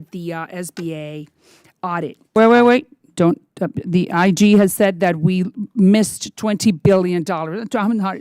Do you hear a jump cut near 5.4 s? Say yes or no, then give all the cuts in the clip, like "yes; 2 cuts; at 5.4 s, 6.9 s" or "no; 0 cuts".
no; 1 cut; at 2.3 s